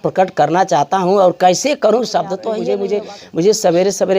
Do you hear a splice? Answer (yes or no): yes